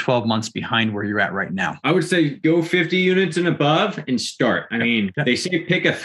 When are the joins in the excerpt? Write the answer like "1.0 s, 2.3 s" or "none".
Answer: 1.8 s, 2.4 s, 4.9 s